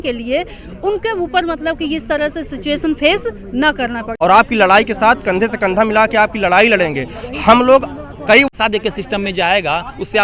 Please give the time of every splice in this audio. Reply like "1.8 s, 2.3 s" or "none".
4.0 s, 8.5 s